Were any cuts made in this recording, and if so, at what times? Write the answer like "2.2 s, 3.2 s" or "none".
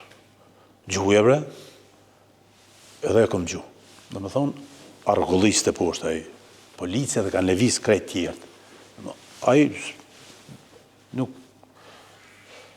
none